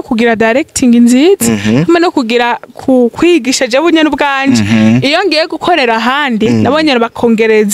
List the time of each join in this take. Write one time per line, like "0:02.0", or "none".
none

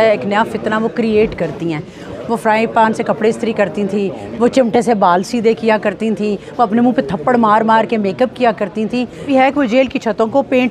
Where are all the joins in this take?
0:02.0
0:09.3

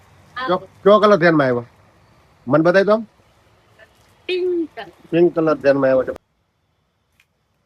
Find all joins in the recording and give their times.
0:06.1

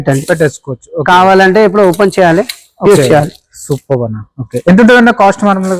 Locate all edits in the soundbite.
none

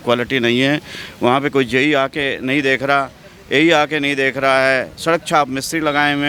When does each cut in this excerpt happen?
none

